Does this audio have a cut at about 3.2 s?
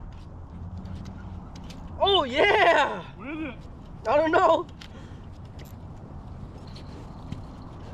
no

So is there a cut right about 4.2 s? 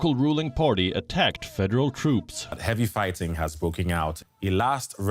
yes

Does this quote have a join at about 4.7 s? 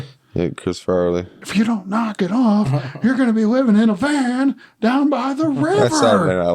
no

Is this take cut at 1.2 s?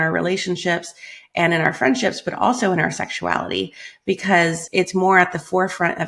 no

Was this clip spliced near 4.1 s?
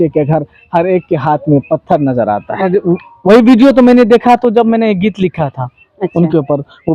no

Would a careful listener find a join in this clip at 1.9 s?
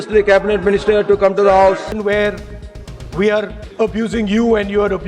yes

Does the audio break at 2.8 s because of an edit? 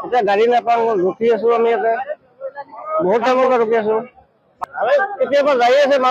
no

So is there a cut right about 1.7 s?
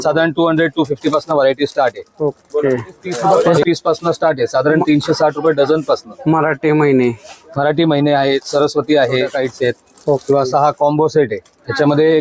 no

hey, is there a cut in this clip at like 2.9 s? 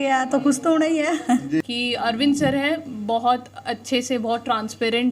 no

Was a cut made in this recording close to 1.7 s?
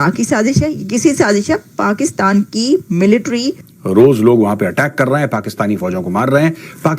no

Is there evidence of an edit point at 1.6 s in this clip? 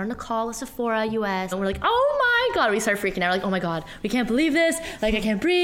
yes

